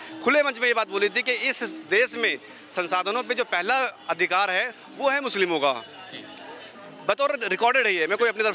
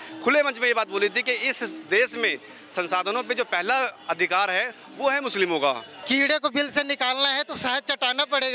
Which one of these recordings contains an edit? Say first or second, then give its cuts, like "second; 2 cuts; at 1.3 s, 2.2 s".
second; 1 cut; at 5.9 s